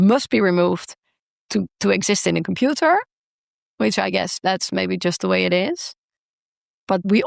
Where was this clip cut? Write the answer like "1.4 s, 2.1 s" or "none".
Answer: none

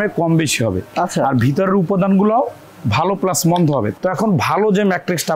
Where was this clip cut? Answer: 3.9 s

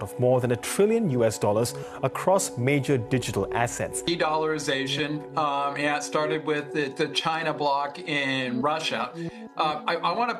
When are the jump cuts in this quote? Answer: 4.0 s

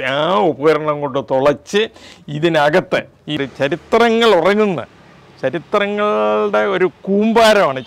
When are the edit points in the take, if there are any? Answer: 3.4 s

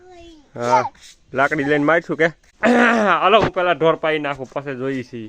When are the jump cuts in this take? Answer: 2.4 s

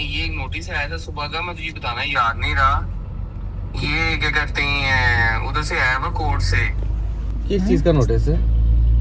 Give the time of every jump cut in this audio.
none

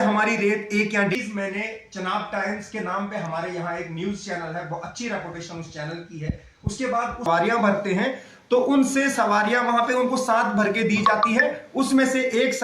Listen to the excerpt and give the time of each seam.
1.1 s, 7.3 s

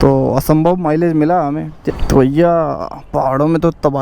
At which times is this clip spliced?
1.8 s

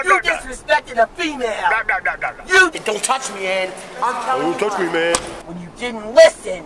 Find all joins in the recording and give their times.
2.7 s, 5.4 s

